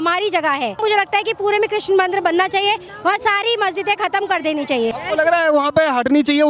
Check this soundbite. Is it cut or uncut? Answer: cut